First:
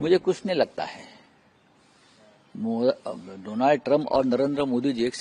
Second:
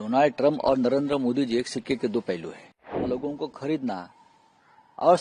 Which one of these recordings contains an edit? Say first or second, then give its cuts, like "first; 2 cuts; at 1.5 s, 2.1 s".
second; 1 cut; at 2.9 s